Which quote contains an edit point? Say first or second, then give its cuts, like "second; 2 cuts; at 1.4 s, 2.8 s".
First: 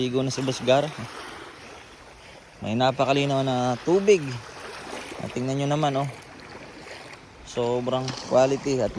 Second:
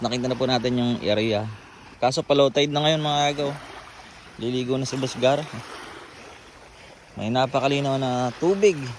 second; 1 cut; at 1.9 s